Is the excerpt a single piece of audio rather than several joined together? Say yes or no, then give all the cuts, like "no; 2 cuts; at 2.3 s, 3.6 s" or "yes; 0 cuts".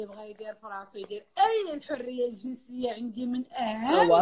yes; 0 cuts